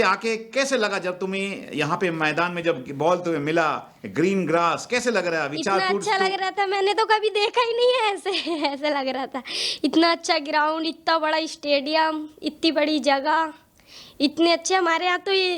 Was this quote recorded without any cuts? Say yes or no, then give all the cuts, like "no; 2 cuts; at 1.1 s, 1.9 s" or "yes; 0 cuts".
yes; 0 cuts